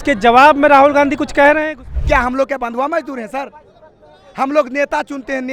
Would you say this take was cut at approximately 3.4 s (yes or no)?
no